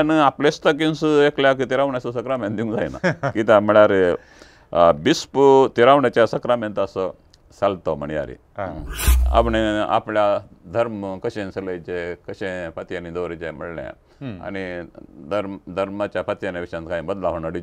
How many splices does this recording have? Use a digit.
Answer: 1